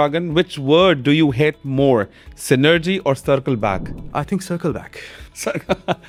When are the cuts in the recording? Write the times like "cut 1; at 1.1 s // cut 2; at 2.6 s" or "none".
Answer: none